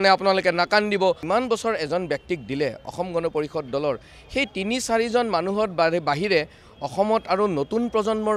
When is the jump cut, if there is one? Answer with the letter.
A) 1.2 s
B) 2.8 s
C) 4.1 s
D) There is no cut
A